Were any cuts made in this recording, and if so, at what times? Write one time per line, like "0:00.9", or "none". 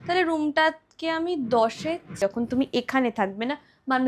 0:02.1